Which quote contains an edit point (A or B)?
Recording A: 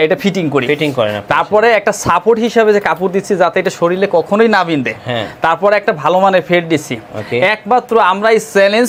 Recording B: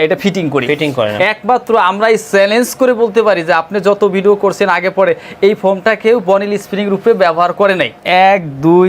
B